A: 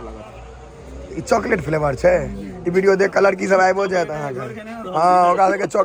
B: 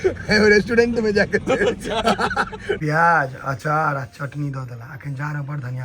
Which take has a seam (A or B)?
B